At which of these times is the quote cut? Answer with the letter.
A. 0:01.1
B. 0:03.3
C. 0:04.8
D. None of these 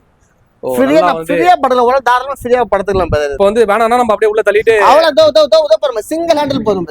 B